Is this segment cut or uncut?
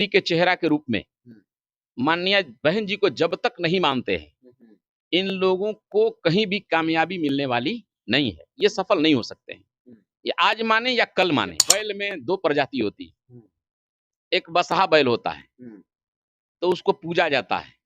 cut